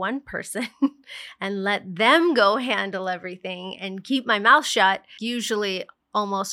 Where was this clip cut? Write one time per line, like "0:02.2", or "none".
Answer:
0:05.1